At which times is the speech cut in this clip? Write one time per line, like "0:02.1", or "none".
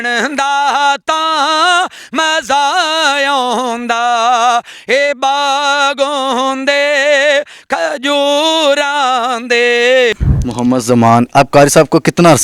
0:10.3